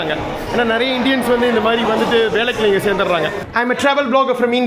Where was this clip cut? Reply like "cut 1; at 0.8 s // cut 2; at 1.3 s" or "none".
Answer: cut 1; at 3.4 s